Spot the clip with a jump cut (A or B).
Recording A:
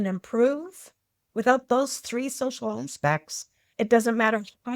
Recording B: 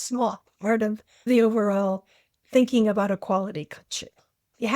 B